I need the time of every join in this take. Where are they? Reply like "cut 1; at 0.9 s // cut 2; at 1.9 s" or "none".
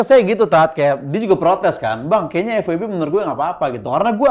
none